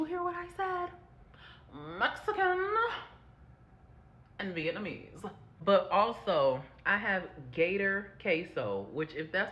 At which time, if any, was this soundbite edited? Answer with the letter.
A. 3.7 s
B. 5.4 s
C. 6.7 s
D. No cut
B